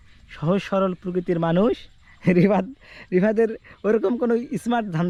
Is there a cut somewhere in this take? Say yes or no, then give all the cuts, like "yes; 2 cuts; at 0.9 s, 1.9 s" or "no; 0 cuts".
no; 0 cuts